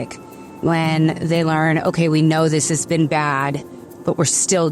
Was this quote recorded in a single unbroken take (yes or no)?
yes